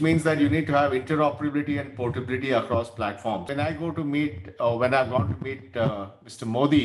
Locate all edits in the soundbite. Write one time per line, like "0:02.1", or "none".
0:03.4